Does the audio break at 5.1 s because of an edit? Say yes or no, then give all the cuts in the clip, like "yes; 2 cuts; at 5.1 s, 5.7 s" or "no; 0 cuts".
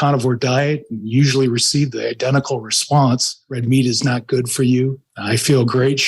yes; 2 cuts; at 3.6 s, 5.1 s